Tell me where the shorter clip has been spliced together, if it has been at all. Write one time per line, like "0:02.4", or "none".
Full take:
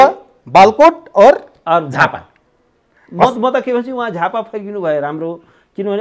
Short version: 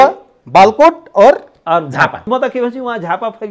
0:02.2